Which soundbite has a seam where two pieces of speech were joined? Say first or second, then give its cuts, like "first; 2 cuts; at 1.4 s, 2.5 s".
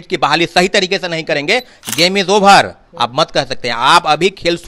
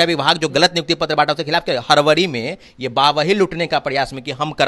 first; 1 cut; at 1.8 s